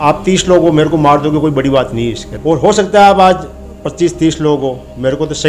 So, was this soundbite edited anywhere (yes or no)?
yes